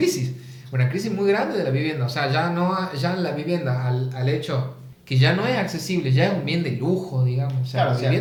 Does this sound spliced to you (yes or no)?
no